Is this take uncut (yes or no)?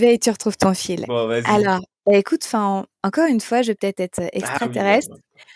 yes